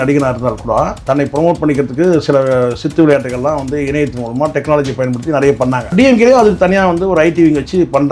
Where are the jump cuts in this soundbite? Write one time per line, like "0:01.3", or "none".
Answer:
0:01.0
0:05.9